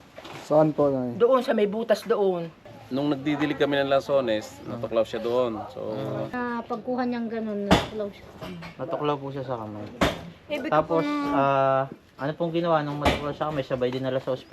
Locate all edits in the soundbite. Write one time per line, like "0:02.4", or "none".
0:02.7
0:06.3